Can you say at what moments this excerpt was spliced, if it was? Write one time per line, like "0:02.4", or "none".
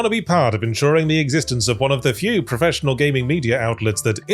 none